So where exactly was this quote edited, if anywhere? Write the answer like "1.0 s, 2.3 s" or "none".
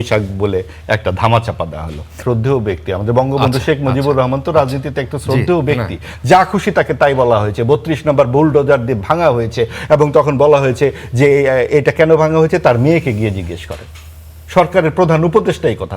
2.2 s